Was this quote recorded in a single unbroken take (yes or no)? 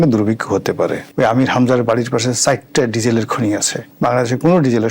no